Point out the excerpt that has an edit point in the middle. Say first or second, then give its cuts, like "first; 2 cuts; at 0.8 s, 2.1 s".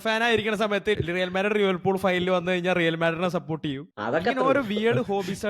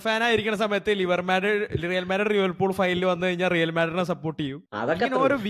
first; 1 cut; at 1.0 s